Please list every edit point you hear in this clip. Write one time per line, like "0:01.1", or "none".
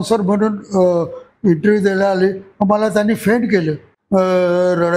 0:03.9